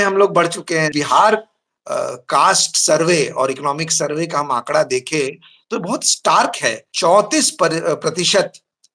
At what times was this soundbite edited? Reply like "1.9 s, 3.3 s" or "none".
0.9 s, 6.9 s